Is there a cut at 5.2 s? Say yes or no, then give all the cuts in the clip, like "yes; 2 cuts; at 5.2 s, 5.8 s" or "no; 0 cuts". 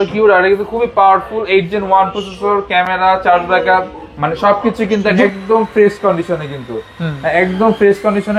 yes; 1 cut; at 5.2 s